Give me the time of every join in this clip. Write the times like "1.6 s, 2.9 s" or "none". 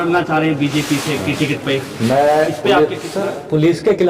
3.1 s